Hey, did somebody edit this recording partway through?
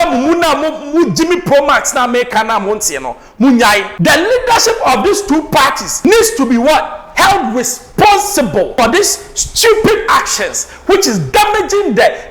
yes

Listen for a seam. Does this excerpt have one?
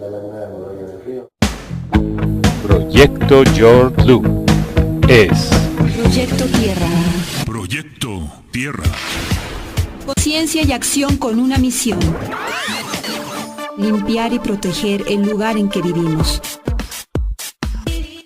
yes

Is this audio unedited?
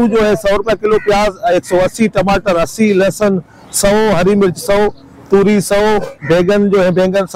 yes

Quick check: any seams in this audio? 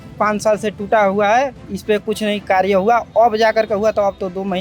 no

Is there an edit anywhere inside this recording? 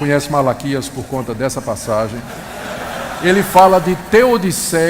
yes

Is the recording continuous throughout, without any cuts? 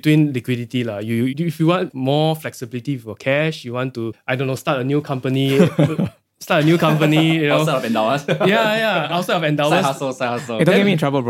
no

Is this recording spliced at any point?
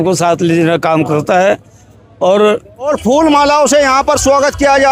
yes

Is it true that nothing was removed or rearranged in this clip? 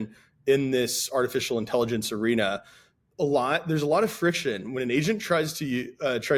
yes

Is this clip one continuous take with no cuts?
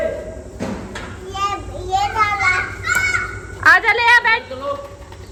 yes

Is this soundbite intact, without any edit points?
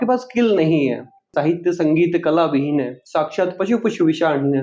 no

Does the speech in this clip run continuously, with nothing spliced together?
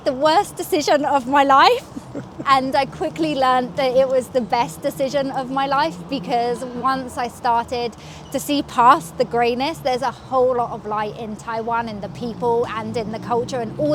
yes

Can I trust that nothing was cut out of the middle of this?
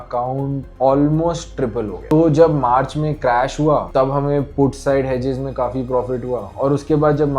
yes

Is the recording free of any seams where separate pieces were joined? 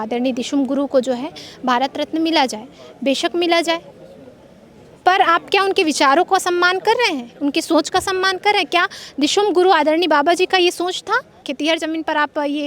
no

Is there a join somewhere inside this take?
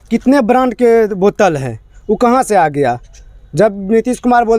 no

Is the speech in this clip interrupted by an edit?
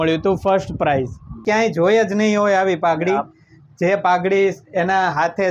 yes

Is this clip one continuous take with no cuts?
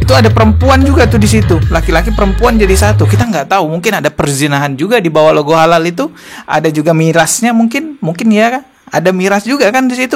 yes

